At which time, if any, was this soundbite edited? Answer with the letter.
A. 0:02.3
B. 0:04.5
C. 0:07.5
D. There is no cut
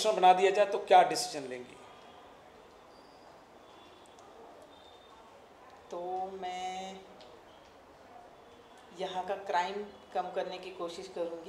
D